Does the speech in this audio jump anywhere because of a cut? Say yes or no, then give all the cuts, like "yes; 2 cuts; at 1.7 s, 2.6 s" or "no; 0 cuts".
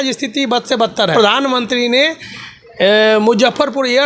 yes; 1 cut; at 1.1 s